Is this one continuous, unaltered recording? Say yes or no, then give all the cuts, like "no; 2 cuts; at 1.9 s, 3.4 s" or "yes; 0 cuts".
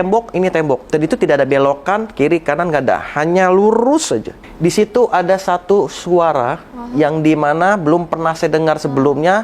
no; 2 cuts; at 0.8 s, 4.4 s